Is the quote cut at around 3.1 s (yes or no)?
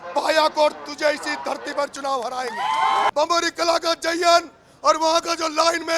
yes